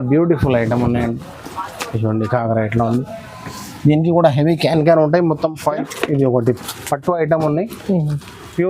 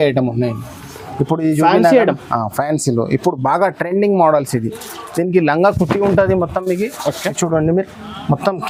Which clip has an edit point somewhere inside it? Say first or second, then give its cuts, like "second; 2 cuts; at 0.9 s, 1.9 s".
first; 1 cut; at 5.6 s